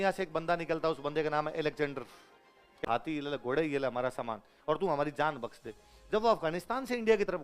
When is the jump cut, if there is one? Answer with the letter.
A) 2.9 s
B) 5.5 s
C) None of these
A